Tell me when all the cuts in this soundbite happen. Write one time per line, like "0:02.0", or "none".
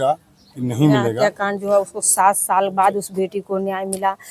0:01.1